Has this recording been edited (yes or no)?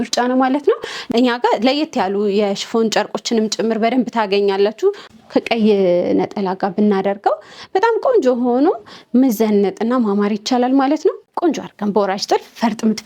yes